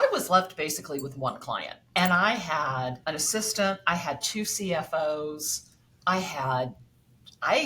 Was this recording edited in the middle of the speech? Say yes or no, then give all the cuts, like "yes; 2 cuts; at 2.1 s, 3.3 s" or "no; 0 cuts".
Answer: no; 0 cuts